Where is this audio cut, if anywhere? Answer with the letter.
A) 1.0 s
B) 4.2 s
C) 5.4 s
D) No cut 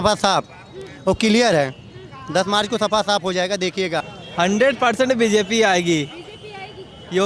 B